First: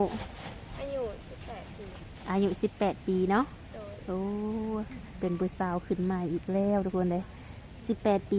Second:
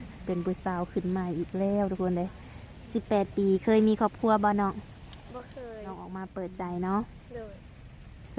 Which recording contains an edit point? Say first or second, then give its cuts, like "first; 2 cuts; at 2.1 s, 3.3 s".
second; 1 cut; at 6.1 s